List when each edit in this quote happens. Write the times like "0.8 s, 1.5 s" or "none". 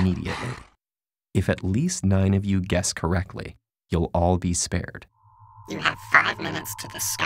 3.6 s

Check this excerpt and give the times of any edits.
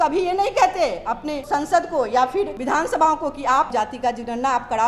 1.4 s, 2.6 s, 3.7 s

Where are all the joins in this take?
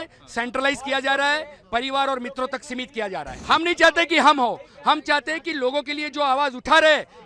3.3 s

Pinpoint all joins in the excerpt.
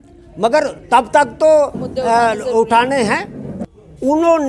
3.4 s

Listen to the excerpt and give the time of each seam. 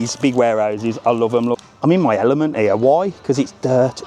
1.7 s

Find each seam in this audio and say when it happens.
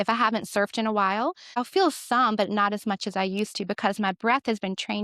1.6 s

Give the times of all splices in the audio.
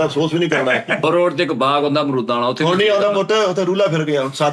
1.0 s

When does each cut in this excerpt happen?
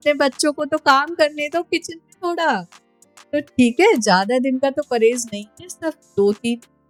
none

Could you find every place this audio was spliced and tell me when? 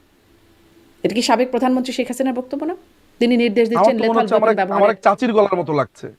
none

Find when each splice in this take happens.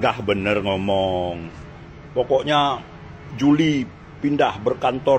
none

